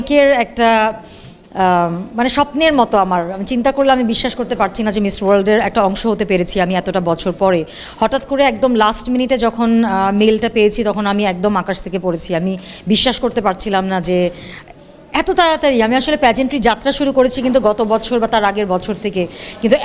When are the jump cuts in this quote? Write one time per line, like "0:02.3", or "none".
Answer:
none